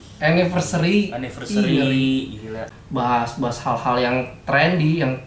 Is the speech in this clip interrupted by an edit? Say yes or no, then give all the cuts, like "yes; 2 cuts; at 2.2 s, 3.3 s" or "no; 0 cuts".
yes; 1 cut; at 2.6 s